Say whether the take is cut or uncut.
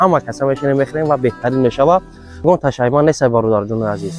cut